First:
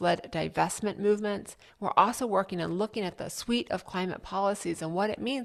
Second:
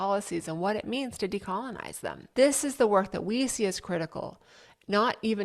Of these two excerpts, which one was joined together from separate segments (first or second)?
second